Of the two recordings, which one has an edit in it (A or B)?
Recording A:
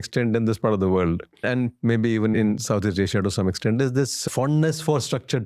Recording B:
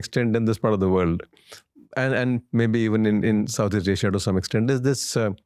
A